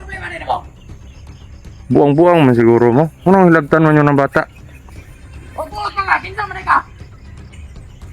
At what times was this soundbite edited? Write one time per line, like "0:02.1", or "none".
0:06.8